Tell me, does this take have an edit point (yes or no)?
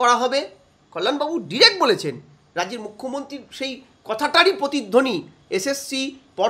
no